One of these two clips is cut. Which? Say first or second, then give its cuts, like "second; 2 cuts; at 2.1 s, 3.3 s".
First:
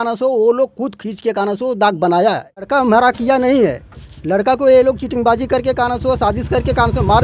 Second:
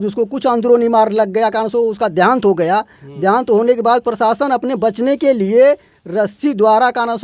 first; 1 cut; at 2.7 s